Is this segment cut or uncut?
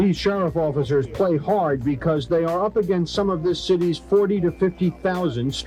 uncut